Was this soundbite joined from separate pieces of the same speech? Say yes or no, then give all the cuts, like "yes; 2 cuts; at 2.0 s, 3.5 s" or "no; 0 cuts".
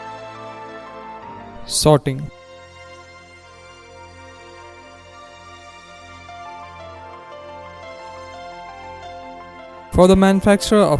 no; 0 cuts